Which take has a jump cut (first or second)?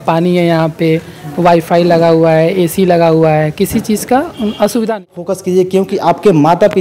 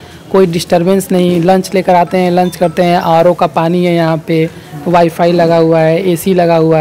first